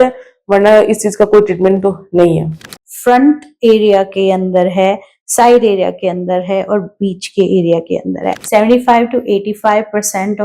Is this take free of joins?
no; 2 cuts; at 2.7 s, 8.3 s

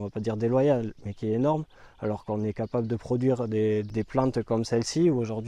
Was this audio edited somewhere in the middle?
yes; 1 cut; at 3.9 s

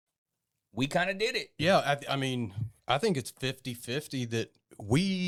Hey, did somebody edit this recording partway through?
no; 0 cuts

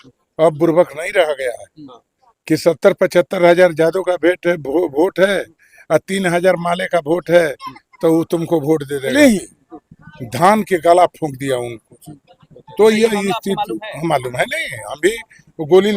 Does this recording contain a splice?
yes; 1 cut; at 9.1 s

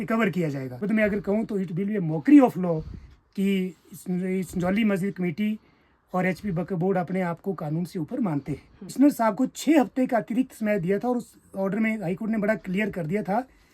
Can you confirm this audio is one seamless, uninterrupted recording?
no; 2 cuts; at 0.8 s, 8.9 s

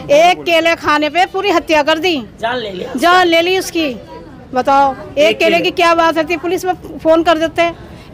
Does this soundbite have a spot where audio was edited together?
no; 0 cuts

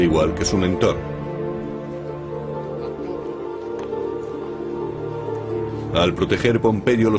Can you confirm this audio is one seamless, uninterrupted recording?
yes; 0 cuts

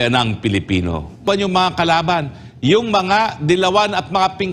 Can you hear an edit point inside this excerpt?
yes; 1 cut; at 1.2 s

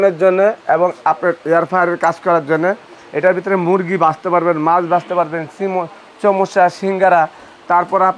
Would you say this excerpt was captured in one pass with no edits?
yes; 0 cuts

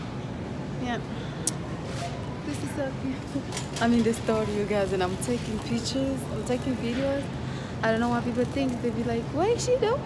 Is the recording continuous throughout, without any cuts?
yes; 0 cuts

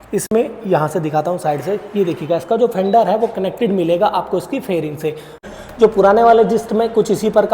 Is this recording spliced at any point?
yes; 1 cut; at 5.4 s

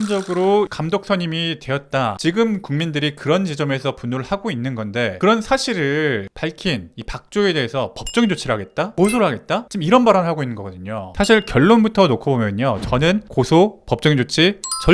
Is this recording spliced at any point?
yes; 2 cuts; at 2.2 s, 11.1 s

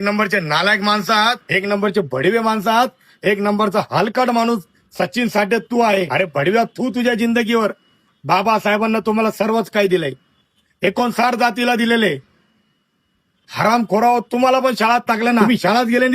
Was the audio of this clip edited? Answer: yes; 3 cuts; at 1.4 s, 6.1 s, 15.4 s

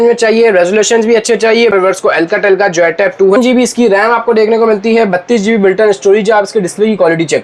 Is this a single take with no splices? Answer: no; 2 cuts; at 1.7 s, 3.4 s

